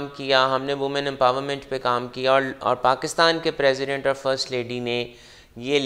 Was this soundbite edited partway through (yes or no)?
no